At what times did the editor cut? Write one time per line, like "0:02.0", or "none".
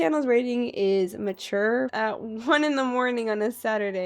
0:01.9